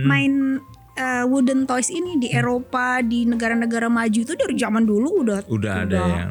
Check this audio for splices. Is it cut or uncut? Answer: uncut